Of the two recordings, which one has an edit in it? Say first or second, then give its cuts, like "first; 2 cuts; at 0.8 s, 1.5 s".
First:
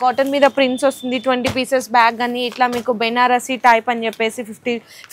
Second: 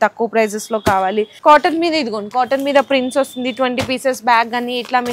second; 1 cut; at 1.3 s